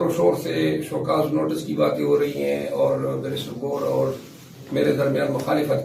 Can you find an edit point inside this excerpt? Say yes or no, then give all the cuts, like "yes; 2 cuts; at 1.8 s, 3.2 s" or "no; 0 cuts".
no; 0 cuts